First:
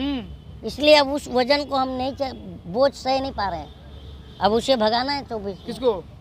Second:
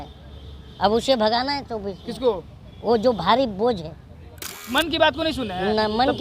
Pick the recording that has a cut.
second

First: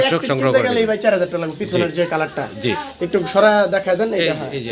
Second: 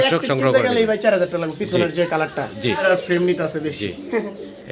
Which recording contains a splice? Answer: second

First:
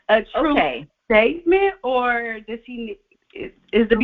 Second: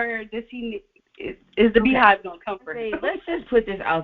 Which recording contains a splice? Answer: second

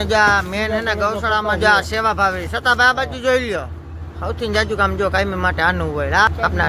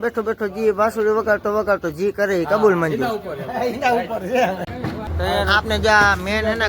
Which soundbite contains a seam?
second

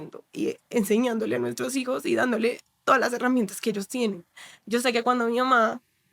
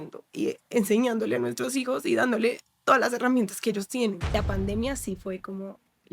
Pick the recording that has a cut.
second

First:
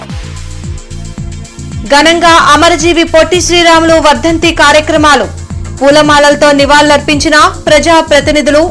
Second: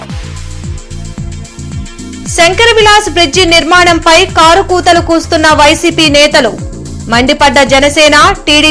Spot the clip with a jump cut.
first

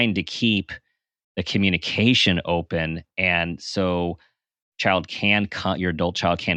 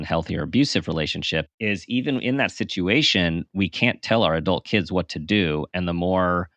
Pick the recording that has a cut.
second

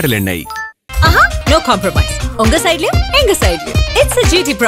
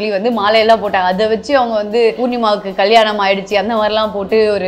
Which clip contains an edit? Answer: second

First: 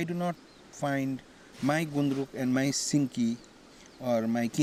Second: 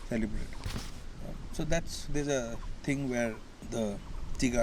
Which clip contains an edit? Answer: second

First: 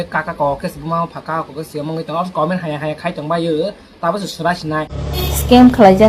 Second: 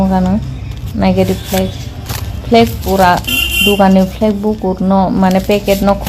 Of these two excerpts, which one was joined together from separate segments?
first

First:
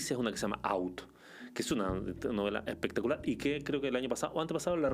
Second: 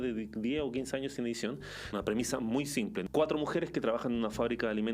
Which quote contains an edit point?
second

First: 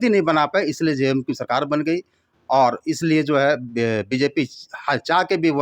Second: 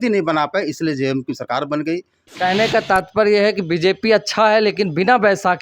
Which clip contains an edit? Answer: second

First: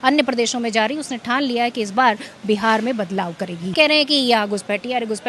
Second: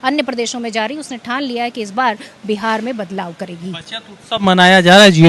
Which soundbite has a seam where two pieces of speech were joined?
first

